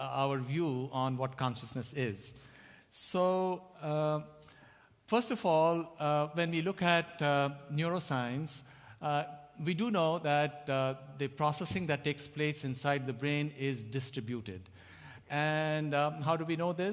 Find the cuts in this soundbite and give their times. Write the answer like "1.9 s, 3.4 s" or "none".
10.8 s